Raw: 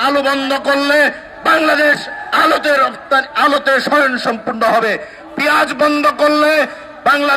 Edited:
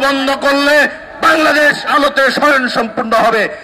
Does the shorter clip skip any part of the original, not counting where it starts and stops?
yes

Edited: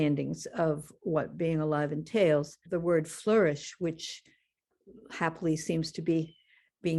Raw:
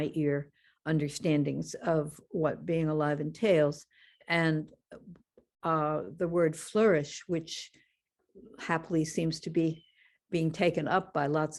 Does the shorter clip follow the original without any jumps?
no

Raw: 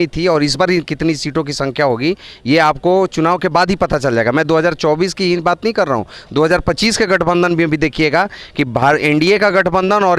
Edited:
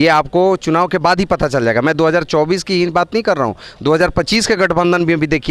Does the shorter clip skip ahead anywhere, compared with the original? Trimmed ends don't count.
no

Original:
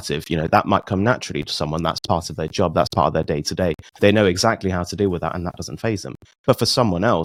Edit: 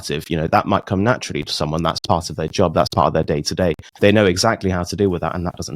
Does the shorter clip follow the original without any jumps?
yes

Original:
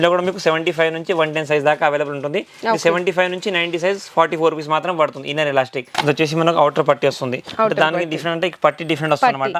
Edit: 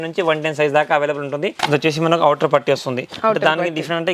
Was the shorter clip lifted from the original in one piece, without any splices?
no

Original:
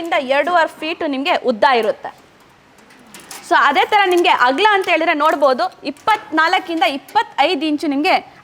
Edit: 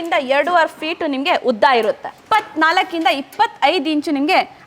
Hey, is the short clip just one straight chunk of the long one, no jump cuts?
no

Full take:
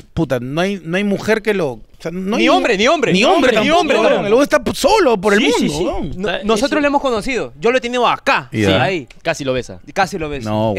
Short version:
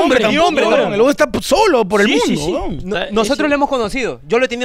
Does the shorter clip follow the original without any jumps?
yes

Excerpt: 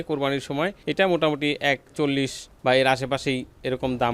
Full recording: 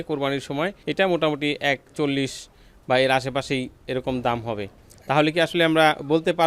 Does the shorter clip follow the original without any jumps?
no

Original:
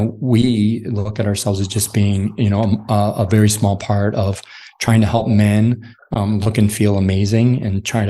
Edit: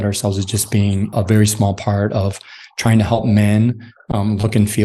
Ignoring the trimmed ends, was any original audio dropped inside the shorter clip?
yes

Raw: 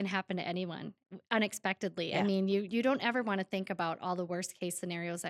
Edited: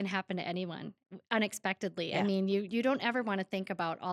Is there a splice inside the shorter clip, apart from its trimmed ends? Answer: no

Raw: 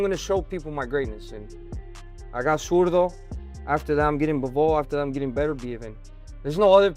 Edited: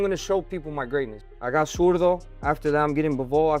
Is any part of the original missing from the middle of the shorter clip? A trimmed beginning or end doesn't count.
yes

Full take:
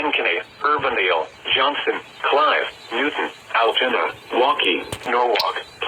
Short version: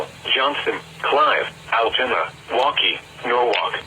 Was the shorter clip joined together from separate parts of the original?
yes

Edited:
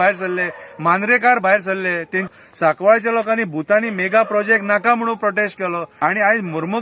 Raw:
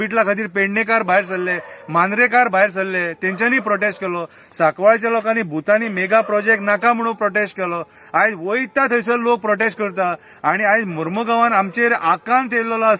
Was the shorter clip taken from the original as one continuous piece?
no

